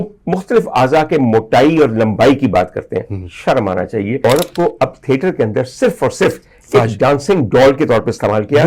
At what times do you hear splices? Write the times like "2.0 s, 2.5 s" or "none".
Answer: 4.2 s

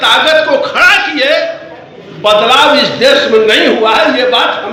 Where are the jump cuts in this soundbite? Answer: none

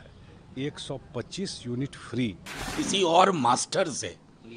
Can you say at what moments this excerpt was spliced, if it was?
2.6 s

